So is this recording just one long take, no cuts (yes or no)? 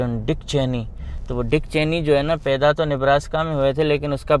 yes